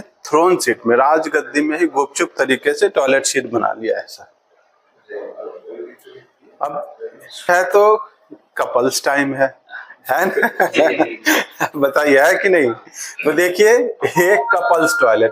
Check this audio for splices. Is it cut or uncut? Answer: cut